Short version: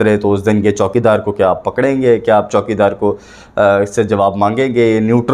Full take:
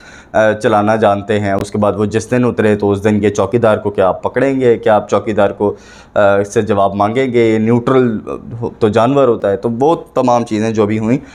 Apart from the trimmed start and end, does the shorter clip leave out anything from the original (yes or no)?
no